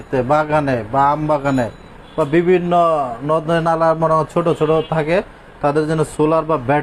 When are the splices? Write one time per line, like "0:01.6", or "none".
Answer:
none